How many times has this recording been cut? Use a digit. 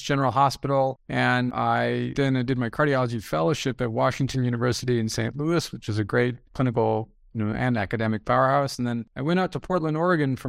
3